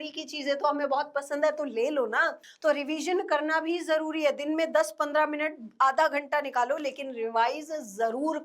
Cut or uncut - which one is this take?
cut